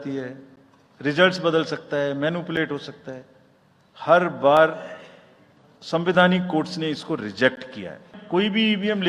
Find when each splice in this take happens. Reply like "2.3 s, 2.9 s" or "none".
8.2 s

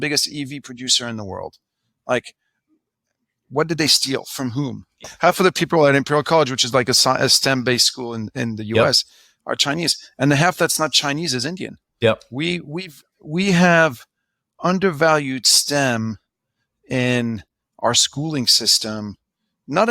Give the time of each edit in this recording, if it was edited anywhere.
5.1 s, 11.9 s

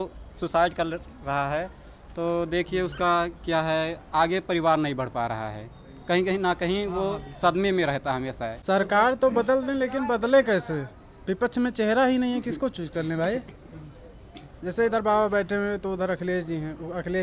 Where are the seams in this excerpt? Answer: 8.5 s

